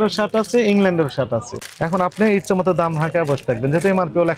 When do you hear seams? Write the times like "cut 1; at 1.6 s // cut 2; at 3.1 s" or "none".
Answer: cut 1; at 1.6 s